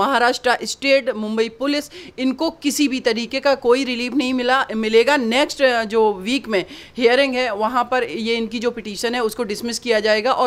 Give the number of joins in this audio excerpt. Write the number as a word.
zero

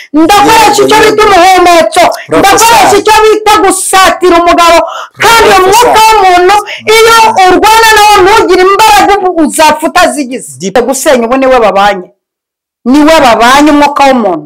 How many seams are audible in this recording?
one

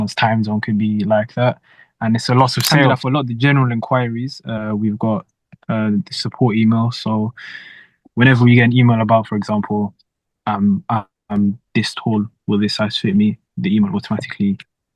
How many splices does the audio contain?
zero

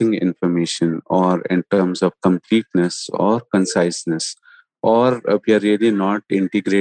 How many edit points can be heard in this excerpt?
zero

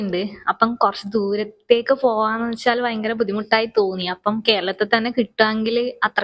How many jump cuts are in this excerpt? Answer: zero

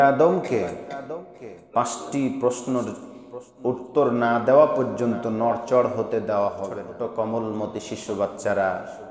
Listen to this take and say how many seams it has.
one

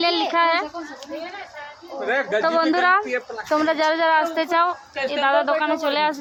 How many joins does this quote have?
zero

